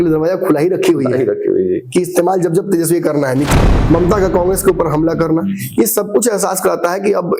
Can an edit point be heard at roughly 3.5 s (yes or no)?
yes